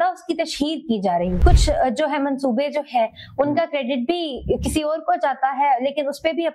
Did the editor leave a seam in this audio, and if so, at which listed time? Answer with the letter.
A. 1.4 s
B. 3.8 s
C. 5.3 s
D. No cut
A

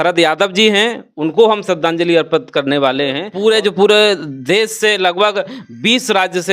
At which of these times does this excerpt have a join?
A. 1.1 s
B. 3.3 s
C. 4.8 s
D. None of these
B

